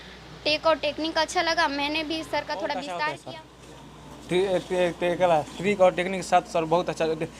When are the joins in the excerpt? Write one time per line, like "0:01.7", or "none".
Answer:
0:03.2